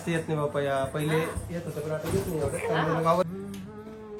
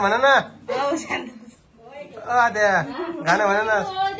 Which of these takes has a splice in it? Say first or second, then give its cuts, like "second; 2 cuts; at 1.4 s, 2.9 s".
first; 1 cut; at 3.2 s